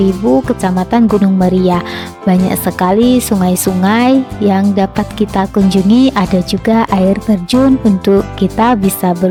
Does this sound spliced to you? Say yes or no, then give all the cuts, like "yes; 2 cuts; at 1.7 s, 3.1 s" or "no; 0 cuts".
no; 0 cuts